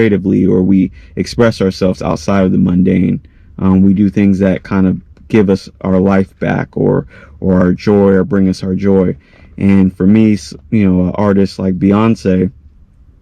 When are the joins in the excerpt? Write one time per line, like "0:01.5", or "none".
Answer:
none